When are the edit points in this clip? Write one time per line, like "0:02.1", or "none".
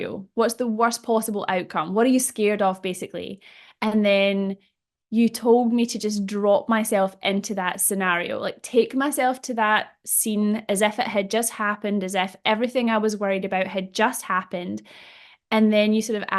none